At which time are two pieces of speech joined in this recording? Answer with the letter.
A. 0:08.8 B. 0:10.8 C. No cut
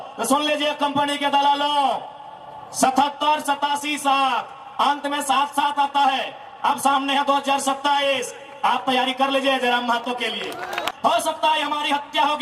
B